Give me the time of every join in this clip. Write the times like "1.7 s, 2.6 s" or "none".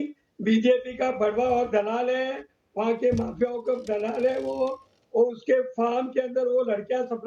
none